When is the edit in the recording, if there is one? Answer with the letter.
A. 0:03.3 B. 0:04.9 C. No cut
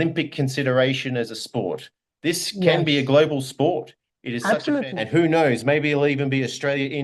B